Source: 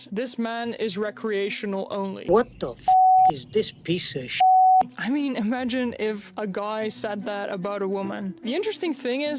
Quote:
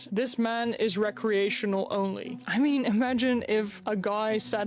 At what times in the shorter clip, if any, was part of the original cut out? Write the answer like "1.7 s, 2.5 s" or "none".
2.3 s